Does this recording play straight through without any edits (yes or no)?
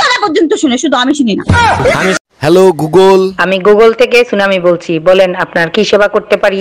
no